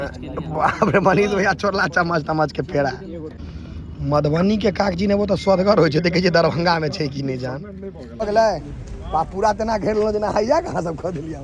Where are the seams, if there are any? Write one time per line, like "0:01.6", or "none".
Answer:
0:03.4
0:08.2